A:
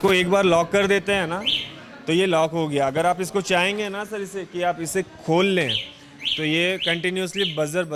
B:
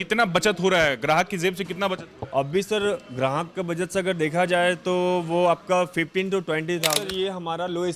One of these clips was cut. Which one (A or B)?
B